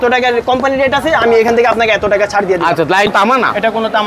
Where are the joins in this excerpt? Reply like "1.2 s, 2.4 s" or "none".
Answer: 3.1 s